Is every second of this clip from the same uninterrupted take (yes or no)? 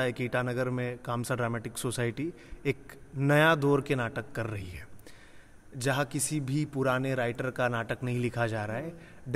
yes